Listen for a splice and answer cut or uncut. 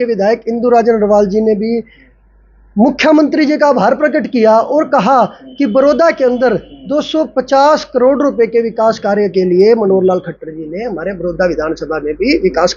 uncut